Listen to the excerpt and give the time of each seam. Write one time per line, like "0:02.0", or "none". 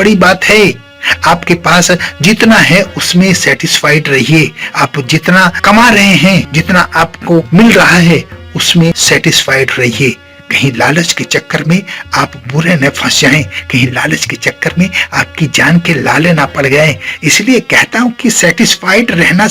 0:06.5
0:09.0